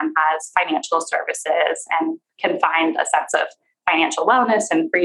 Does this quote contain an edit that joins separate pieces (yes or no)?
no